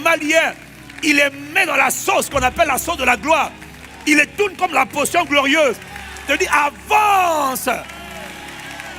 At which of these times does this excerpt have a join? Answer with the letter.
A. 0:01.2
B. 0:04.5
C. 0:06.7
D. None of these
D